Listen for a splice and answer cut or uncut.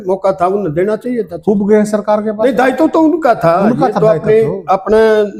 uncut